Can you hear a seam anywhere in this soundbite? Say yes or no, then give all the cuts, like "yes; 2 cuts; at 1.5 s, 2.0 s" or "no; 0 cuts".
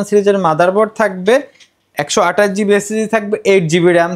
no; 0 cuts